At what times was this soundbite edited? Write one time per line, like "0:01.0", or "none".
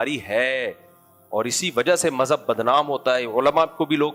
none